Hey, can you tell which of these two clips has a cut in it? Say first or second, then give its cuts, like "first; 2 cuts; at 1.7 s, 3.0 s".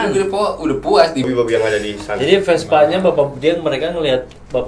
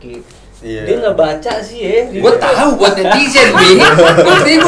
first; 1 cut; at 1.3 s